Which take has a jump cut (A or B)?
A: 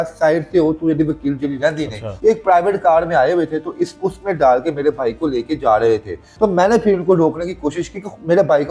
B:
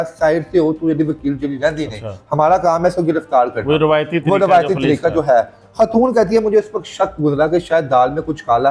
A